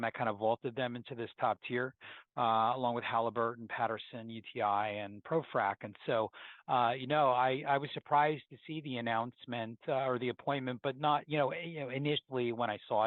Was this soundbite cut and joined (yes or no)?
no